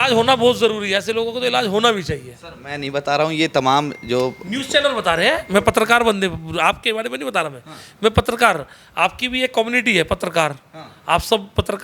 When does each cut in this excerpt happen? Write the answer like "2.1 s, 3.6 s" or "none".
none